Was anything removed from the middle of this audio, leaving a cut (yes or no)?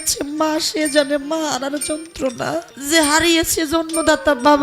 yes